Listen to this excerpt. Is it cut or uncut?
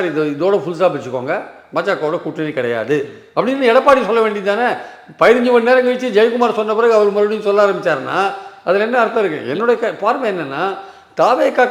uncut